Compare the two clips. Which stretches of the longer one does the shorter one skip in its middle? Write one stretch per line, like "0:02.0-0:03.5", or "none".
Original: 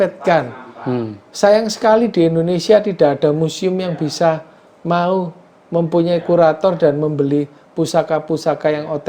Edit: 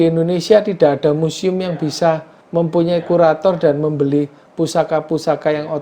0:04.5-0:05.5

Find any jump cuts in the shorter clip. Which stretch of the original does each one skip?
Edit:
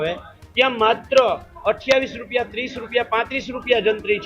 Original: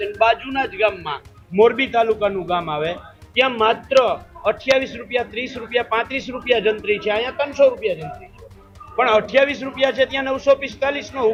none

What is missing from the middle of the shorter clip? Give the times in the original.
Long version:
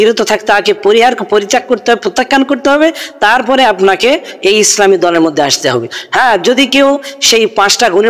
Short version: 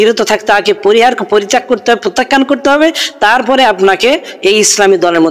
none

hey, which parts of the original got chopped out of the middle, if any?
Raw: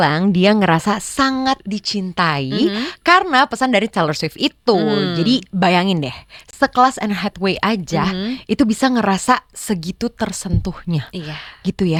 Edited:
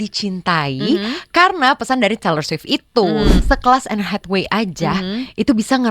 0:05.1-0:06.5

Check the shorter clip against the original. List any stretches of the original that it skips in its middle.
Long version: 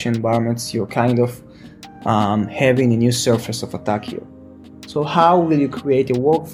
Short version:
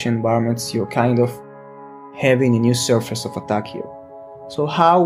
0:02.1-0:02.4

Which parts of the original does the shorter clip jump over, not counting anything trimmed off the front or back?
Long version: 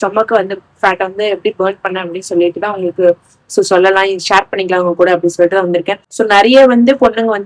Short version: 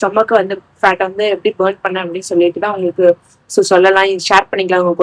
none

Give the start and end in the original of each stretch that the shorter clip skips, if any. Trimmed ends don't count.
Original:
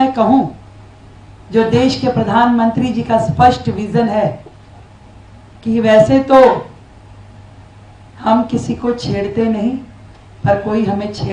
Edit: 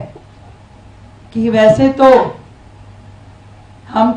none

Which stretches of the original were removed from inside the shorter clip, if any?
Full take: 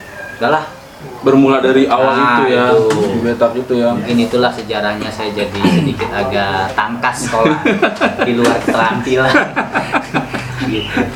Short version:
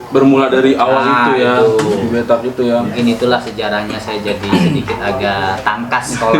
none

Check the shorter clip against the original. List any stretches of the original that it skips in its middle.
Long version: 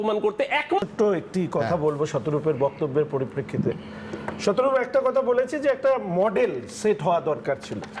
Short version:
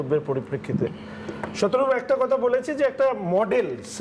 none

